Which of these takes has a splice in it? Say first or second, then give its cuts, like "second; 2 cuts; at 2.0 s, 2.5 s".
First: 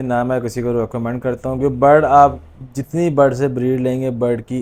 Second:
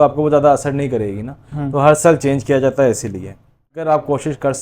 second; 1 cut; at 3.6 s